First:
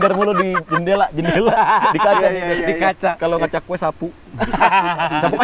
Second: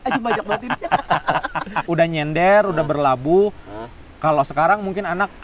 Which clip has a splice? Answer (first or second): second